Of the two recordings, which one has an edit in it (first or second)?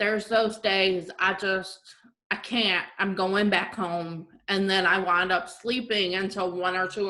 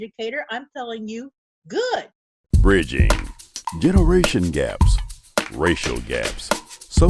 second